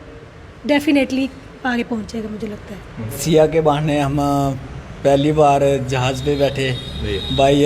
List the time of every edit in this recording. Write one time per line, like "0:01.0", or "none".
0:03.2